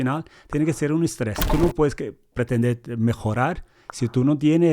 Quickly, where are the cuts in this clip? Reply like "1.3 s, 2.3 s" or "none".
1.5 s